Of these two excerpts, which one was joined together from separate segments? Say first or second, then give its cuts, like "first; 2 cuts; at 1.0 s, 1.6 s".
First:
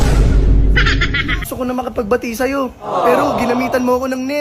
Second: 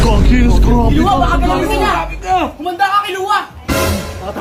first; 1 cut; at 1.0 s